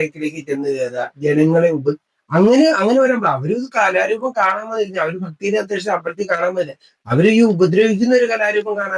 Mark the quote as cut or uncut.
uncut